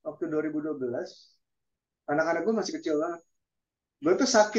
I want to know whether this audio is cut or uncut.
uncut